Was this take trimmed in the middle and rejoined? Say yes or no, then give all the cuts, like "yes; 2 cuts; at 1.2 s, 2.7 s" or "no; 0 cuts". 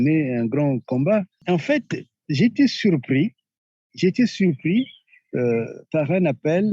yes; 1 cut; at 1.4 s